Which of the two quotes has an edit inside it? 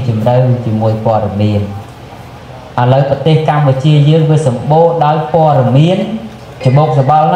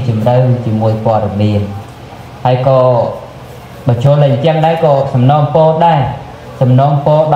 first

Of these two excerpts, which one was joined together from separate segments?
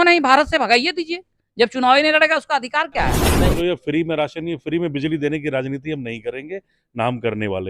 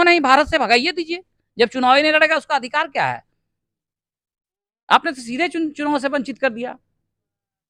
first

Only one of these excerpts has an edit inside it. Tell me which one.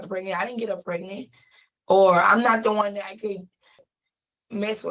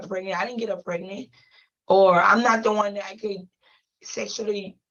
first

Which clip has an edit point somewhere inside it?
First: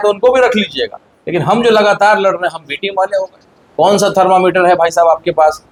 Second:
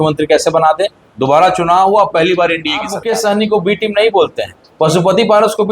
second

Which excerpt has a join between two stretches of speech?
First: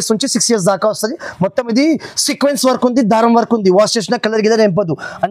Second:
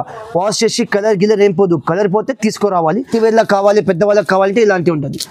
second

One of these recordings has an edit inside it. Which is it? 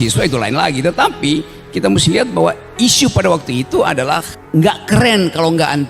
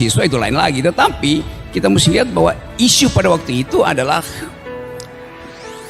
first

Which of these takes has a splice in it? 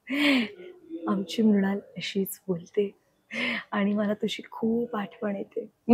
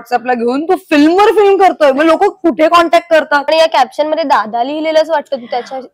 second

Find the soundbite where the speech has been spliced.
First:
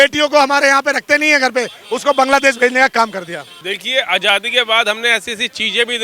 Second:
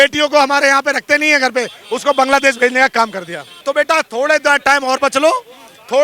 second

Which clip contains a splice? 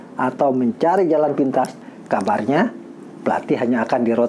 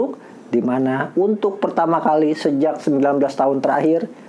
first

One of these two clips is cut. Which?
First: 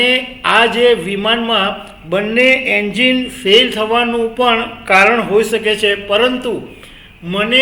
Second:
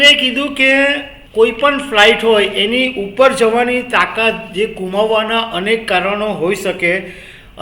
second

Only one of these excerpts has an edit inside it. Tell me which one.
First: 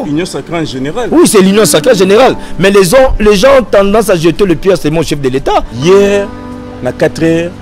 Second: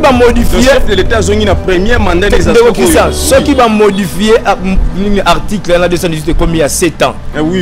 first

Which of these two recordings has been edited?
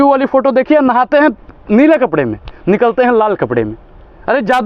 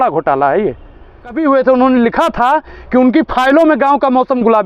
second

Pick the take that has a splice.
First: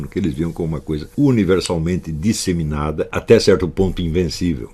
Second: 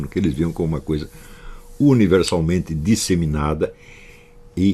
first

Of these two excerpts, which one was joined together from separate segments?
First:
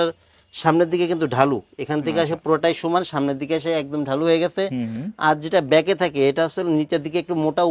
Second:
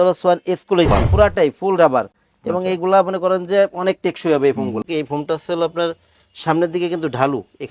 second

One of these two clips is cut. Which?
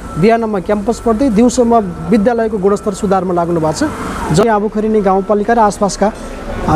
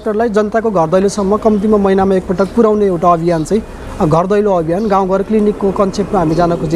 first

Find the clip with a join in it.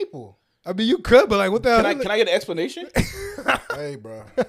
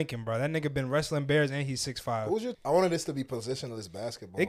second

